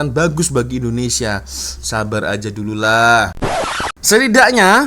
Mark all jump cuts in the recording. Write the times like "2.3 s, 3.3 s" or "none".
3.3 s